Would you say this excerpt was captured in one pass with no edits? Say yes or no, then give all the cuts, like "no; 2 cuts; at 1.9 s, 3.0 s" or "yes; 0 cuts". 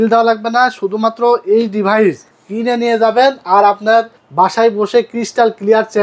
yes; 0 cuts